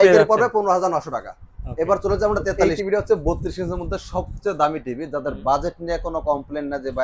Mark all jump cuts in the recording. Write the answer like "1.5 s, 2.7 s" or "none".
2.7 s